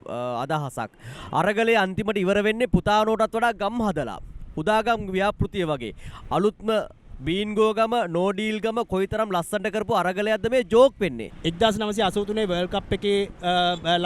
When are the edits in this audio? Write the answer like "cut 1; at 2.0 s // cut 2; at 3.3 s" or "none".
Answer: cut 1; at 11.3 s